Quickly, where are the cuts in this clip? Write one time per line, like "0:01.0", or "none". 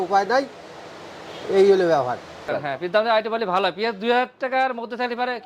0:02.5